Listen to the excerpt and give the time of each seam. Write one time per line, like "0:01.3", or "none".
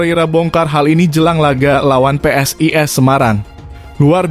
none